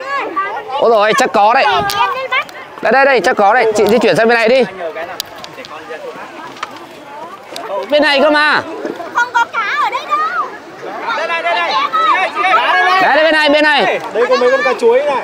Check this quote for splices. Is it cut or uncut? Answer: cut